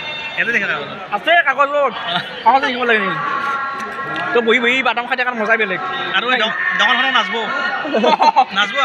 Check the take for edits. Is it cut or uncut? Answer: uncut